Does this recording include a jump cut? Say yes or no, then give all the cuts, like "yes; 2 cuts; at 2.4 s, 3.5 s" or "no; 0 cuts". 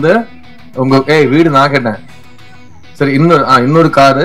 no; 0 cuts